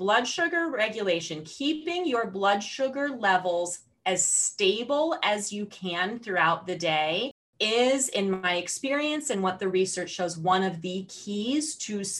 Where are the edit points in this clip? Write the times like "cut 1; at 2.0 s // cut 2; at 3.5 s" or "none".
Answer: none